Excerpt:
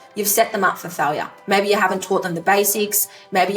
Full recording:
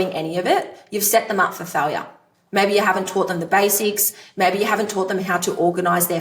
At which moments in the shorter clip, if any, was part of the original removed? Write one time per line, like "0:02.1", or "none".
0:01.3